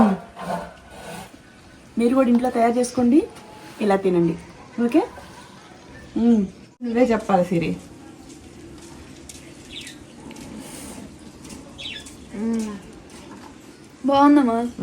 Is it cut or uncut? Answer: cut